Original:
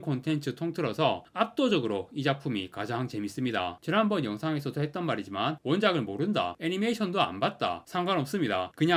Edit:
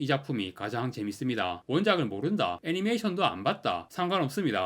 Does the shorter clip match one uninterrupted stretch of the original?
no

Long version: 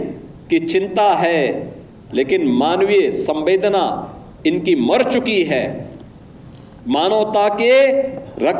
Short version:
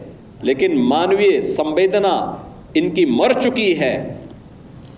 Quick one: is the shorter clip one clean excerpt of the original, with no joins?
yes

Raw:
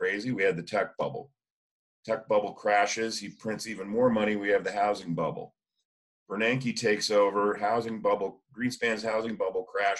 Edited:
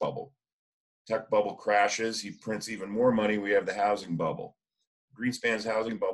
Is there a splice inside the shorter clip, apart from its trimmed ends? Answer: yes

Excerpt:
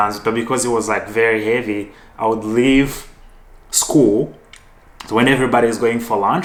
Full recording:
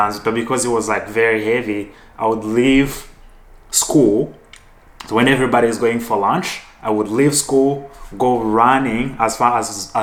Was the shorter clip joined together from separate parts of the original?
no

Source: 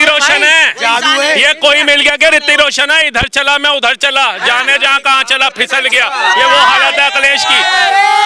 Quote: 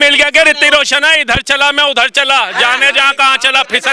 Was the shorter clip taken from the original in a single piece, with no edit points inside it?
yes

